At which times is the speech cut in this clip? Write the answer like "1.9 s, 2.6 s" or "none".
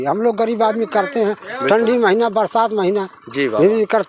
none

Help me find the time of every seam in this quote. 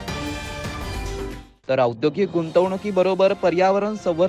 1.5 s

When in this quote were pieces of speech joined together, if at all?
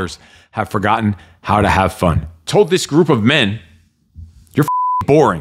2.5 s

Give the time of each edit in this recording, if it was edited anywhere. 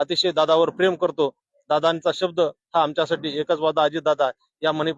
none

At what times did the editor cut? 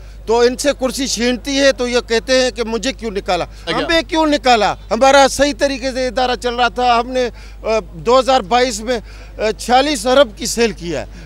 3.7 s

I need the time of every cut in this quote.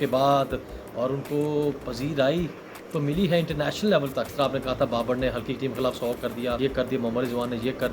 4.3 s, 6.6 s

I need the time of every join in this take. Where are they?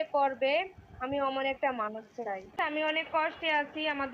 2.5 s

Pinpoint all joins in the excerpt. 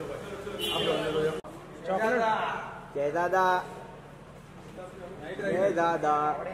1.5 s

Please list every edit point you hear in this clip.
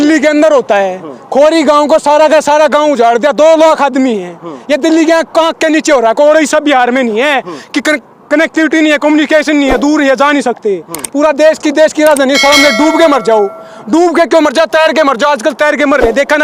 none

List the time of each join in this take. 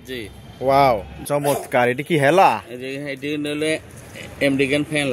1.2 s

